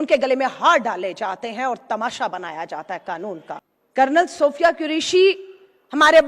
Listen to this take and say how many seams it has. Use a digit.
1